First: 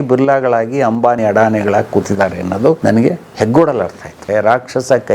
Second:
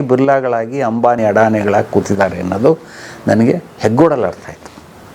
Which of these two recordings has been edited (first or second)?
first